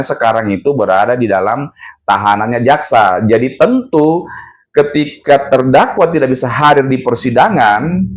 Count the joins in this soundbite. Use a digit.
0